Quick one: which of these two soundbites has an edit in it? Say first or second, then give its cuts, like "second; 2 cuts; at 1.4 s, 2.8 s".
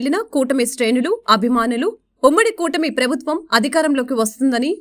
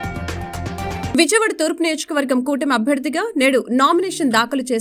second; 1 cut; at 1.1 s